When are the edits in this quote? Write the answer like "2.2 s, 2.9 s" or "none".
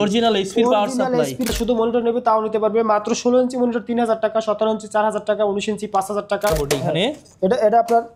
1.5 s, 6.5 s